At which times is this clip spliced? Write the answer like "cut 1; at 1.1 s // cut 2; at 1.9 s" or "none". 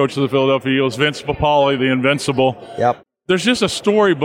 cut 1; at 3.0 s